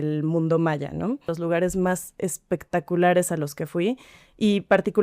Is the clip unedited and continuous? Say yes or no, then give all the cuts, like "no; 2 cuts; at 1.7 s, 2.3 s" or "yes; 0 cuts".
no; 1 cut; at 1.3 s